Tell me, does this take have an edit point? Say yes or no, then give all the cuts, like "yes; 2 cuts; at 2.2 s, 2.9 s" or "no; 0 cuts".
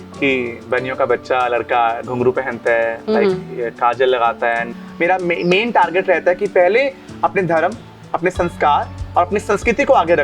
yes; 1 cut; at 4.7 s